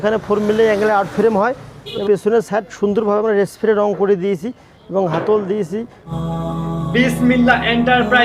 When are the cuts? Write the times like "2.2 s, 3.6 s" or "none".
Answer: 2.0 s, 6.0 s